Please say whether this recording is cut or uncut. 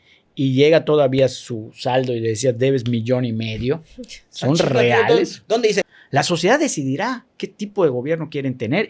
cut